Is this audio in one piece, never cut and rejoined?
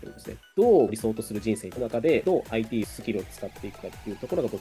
yes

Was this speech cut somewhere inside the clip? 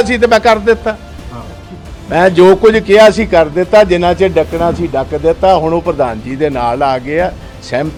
no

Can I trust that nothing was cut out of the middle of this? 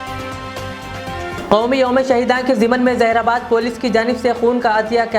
no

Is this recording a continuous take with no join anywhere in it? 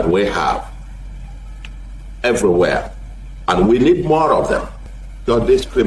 no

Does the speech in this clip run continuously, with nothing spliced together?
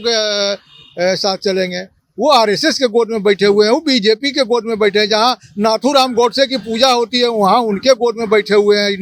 yes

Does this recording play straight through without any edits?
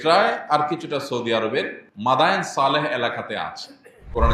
no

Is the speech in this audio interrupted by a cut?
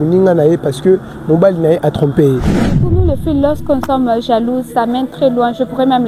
yes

